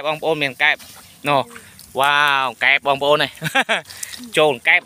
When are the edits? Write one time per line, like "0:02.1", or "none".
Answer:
none